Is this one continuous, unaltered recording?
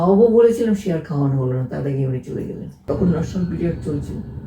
no; 1 cut; at 2.8 s

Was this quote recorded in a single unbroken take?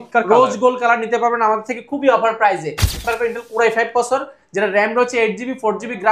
no; 1 cut; at 3.0 s

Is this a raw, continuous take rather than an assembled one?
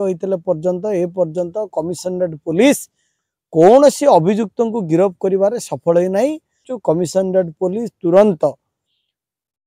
no; 1 cut; at 6.7 s

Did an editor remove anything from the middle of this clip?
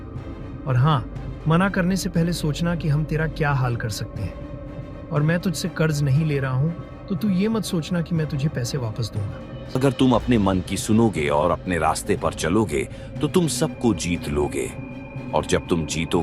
yes; 1 cut; at 9.8 s

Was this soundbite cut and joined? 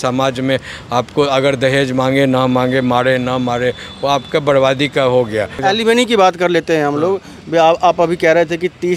no; 0 cuts

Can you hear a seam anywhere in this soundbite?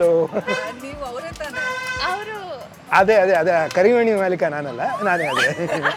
no; 0 cuts

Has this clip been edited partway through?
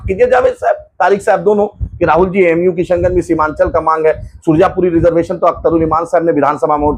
no; 0 cuts

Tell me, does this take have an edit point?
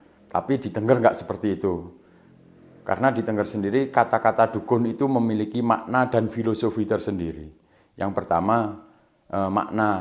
no; 0 cuts

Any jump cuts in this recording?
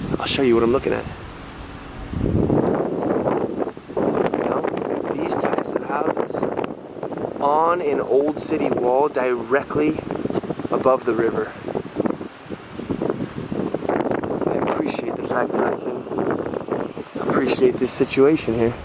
no; 0 cuts

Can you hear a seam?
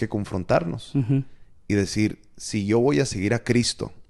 no; 0 cuts

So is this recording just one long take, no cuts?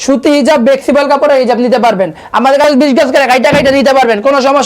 no; 1 cut; at 2.6 s

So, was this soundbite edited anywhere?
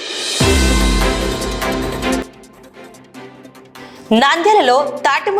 yes; 2 cuts; at 2.2 s, 3.8 s

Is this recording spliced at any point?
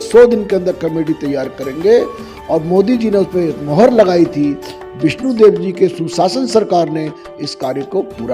no; 0 cuts

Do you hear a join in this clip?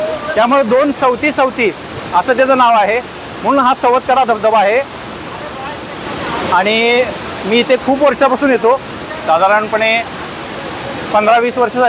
no; 0 cuts

